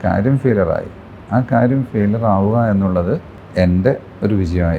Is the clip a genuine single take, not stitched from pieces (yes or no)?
no